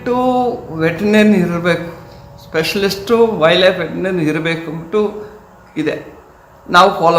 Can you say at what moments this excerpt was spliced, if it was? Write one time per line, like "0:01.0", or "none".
none